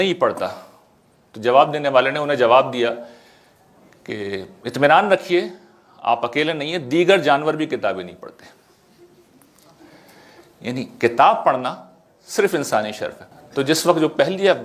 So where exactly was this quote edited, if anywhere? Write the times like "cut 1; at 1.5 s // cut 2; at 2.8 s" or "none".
cut 1; at 13.2 s